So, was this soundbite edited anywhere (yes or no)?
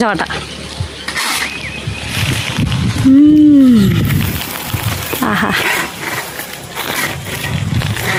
no